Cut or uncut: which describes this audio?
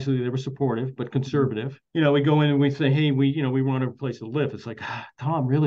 uncut